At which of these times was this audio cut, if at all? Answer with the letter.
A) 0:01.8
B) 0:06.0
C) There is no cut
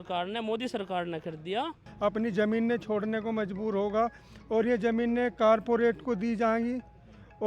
A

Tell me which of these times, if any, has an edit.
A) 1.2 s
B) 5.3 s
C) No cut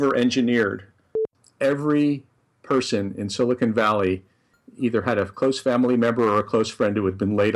A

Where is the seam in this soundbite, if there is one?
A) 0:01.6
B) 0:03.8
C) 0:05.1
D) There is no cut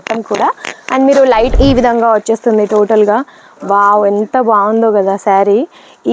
A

